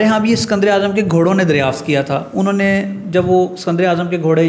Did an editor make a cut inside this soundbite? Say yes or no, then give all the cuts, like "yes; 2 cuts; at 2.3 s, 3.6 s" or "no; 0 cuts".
no; 0 cuts